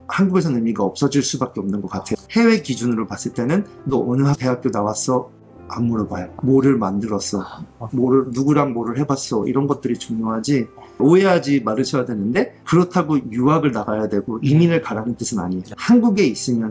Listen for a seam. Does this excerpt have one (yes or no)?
yes